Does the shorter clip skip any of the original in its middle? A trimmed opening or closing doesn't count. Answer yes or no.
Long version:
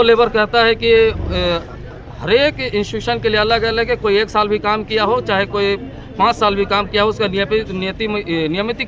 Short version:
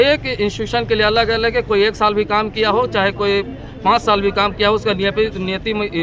no